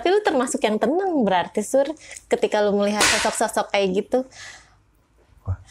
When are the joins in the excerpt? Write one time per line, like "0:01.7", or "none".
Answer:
none

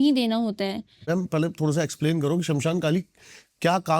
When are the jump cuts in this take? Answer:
0:01.1

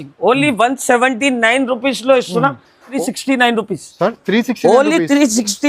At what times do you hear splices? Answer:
0:03.0

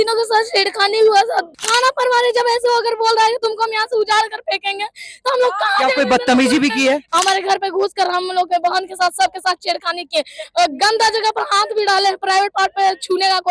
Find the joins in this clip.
0:01.6
0:07.1

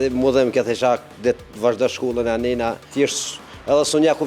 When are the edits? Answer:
0:02.8

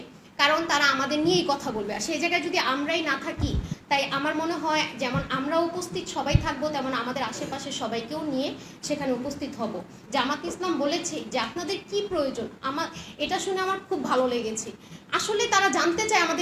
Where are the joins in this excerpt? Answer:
0:03.7
0:10.0

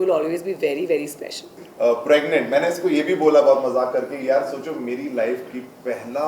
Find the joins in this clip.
0:01.6

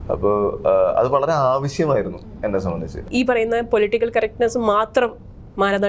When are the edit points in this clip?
0:03.0

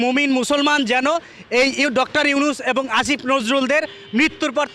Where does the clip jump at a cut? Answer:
none

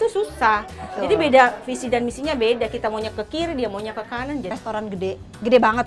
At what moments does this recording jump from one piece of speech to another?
0:04.5

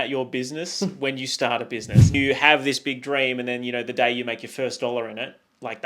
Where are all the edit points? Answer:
0:02.1

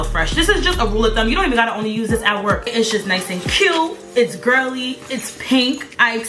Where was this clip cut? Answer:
0:02.7

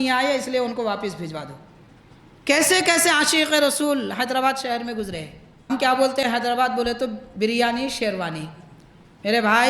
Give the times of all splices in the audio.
0:05.7

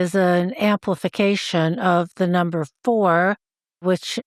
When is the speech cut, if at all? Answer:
none

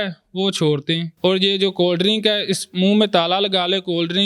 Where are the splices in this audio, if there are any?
0:01.1

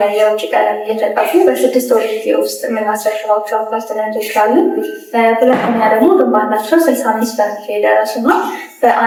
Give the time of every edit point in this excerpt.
none

